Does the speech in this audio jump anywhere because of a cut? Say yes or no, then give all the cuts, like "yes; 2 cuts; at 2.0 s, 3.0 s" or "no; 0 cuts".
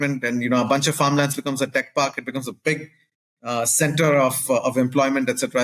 no; 0 cuts